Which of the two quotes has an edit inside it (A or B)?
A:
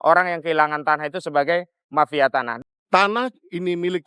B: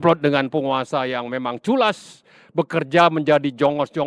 A